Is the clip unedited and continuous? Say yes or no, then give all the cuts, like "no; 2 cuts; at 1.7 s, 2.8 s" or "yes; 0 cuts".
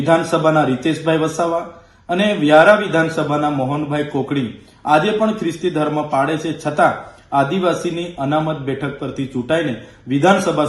yes; 0 cuts